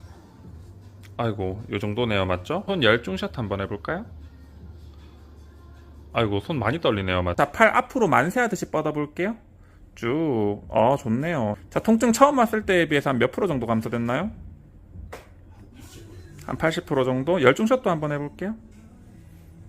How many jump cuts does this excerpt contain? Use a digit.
3